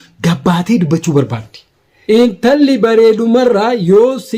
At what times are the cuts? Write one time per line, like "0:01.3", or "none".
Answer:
0:01.8